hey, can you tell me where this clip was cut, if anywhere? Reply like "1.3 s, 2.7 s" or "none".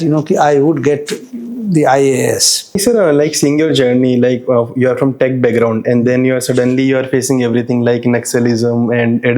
2.8 s